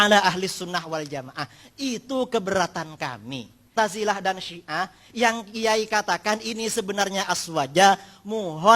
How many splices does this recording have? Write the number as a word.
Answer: one